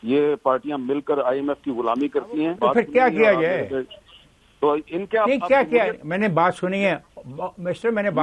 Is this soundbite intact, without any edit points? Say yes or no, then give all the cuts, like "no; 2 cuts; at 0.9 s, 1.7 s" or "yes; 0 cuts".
no; 1 cut; at 2.6 s